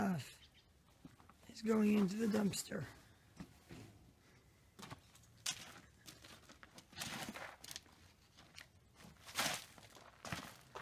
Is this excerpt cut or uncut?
uncut